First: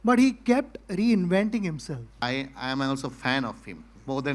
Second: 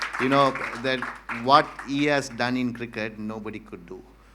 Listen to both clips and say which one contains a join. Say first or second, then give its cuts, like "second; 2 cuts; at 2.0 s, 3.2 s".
first; 1 cut; at 2.1 s